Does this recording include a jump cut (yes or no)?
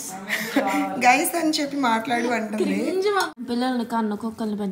yes